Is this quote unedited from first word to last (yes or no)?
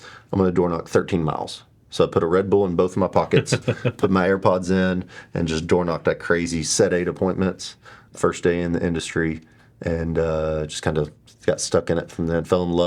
no